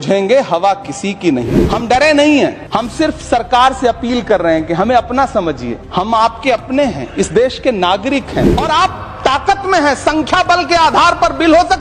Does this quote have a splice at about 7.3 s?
no; 4 cuts; at 1.4 s, 2.6 s, 5.8 s, 8.5 s

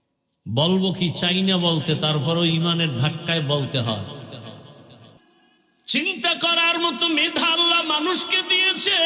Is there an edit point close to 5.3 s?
yes; 1 cut; at 5.3 s

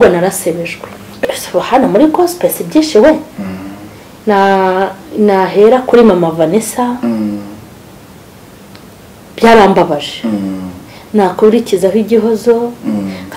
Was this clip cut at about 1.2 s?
yes; 1 cut; at 1.2 s

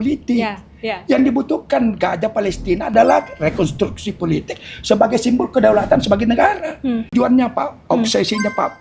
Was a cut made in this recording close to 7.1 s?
yes; 1 cut; at 7.1 s

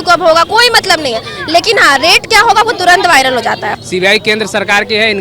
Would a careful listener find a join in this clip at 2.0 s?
no; 1 cut; at 3.7 s

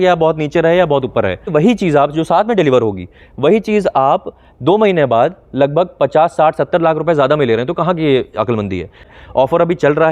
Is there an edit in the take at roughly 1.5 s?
yes; 2 cuts; at 1.5 s, 9.1 s

